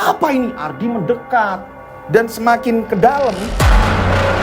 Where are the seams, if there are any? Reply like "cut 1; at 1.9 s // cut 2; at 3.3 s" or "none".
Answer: cut 1; at 3.5 s